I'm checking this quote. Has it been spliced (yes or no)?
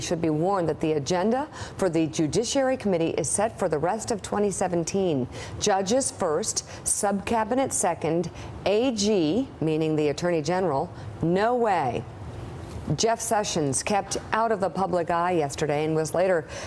yes